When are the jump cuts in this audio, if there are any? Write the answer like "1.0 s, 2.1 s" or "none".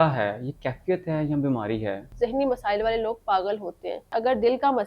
2.1 s, 4.1 s